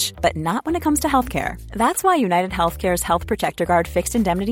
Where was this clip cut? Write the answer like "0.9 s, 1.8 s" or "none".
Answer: none